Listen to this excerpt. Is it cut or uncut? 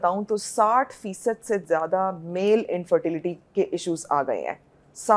uncut